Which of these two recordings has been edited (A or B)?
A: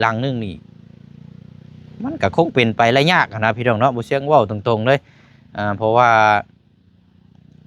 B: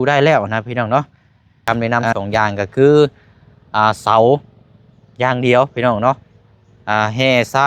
B